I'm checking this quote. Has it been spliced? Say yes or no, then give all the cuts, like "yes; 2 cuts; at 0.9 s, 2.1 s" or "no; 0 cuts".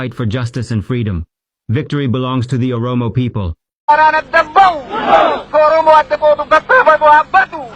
yes; 1 cut; at 3.8 s